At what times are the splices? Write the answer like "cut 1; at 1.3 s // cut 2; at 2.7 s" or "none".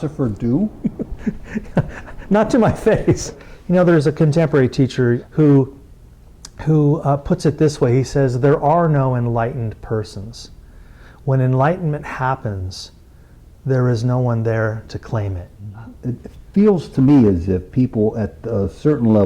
cut 1; at 3.3 s // cut 2; at 5.2 s // cut 3; at 15.7 s